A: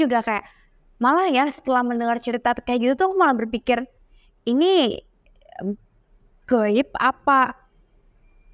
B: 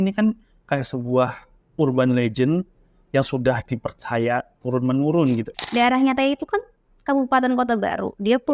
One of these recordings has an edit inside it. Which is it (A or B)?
B